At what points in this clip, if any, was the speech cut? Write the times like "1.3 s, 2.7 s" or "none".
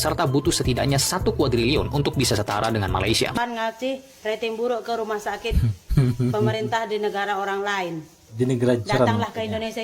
3.4 s